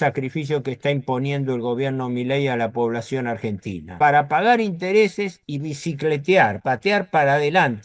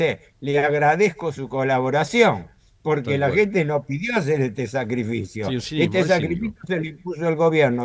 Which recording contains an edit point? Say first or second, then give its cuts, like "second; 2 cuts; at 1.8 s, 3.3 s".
first; 2 cuts; at 3.9 s, 6.6 s